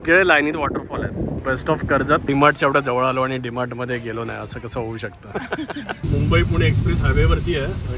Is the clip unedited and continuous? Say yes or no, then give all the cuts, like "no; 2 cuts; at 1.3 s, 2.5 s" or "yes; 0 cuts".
no; 3 cuts; at 1.4 s, 2.2 s, 6.0 s